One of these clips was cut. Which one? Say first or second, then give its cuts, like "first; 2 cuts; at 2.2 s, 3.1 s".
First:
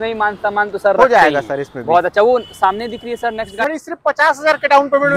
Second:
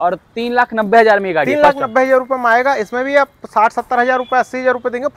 first; 1 cut; at 3.6 s